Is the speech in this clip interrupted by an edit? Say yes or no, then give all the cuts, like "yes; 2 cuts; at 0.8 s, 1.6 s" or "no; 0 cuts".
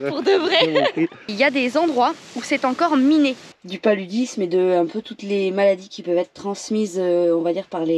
yes; 2 cuts; at 1.2 s, 3.5 s